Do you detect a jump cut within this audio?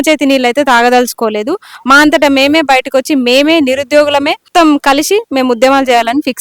yes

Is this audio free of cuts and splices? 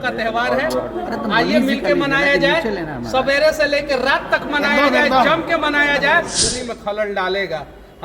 no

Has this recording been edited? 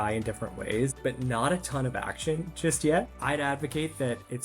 yes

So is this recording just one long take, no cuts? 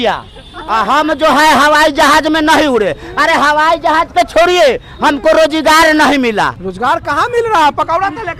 no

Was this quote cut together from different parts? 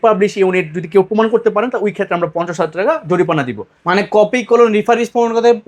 no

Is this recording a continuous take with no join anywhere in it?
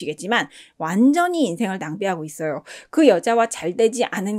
yes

